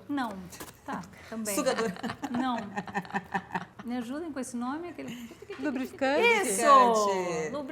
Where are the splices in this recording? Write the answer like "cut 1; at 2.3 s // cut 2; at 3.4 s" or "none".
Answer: cut 1; at 3.7 s